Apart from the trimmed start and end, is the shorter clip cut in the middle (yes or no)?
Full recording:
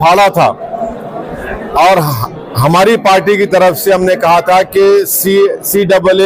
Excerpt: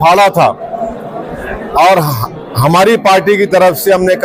no